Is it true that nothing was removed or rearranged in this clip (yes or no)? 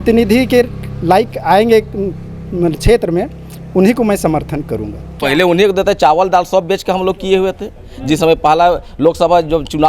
no